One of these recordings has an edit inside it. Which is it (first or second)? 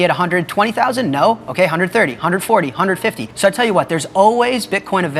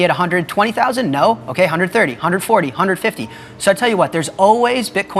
first